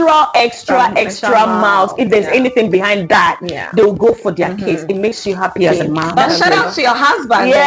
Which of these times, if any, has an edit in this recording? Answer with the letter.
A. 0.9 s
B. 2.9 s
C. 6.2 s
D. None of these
C